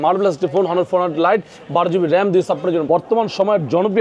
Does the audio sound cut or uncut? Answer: cut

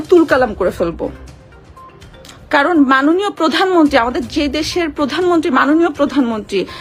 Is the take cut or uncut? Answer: uncut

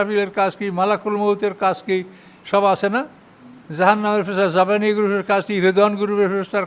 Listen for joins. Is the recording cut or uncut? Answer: uncut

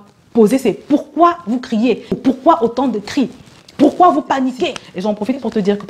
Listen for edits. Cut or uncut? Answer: uncut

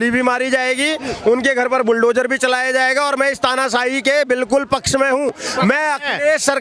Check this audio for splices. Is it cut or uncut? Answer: uncut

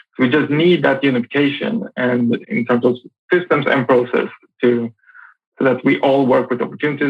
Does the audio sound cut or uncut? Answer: cut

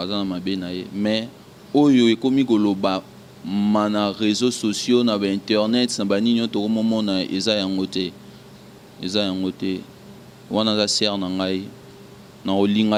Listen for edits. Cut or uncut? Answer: uncut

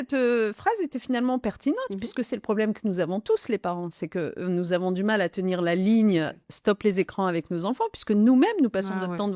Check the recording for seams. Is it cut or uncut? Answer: uncut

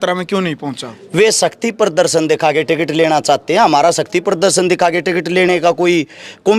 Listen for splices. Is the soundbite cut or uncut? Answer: uncut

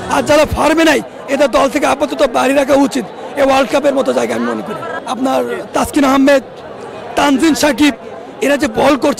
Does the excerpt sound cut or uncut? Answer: cut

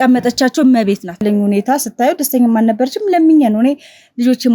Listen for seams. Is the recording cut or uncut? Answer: cut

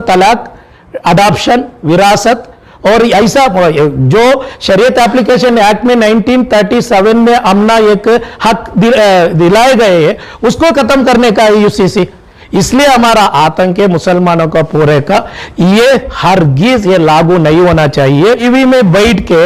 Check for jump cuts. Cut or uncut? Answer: cut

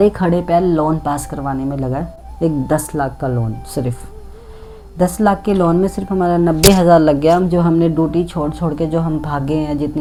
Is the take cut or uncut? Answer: uncut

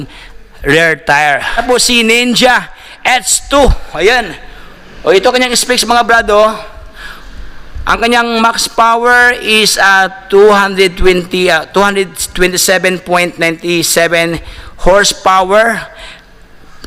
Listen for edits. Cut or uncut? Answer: cut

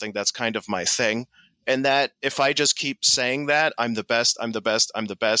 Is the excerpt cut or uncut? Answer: uncut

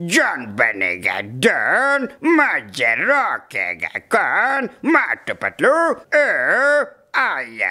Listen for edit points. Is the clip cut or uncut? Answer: cut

